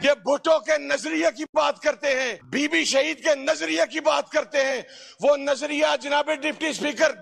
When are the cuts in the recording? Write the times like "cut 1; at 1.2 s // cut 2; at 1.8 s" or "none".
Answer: cut 1; at 2.4 s